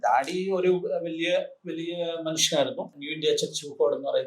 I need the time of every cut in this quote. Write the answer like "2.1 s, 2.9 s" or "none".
2.9 s